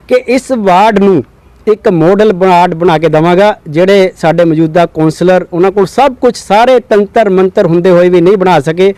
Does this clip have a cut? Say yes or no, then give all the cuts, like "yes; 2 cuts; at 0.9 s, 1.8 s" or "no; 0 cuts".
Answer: no; 0 cuts